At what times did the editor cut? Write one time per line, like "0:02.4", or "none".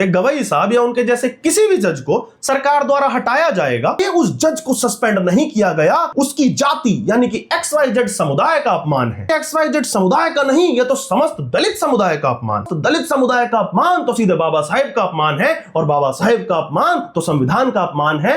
0:04.0
0:06.1
0:09.3
0:12.7